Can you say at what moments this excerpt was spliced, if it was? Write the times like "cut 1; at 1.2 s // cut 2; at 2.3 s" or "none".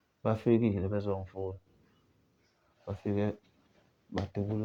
none